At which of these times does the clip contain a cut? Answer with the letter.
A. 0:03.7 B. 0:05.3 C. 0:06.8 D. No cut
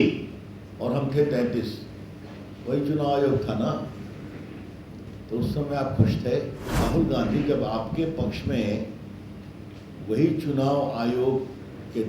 C